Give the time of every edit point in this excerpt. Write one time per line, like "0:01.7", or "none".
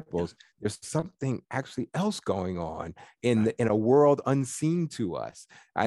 none

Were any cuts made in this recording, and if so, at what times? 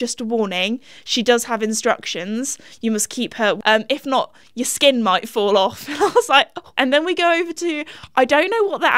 0:03.6
0:06.6

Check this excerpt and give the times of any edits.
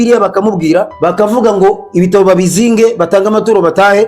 0:00.9

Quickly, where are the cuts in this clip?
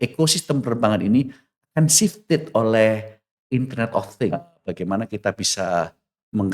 0:04.5

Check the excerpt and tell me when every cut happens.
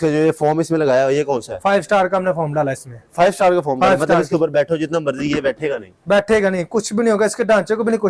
none

